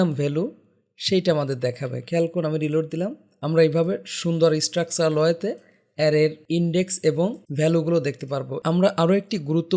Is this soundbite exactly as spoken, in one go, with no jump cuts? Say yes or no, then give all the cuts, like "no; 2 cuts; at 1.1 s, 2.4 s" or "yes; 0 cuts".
no; 4 cuts; at 3.3 s, 6.4 s, 7.4 s, 8.5 s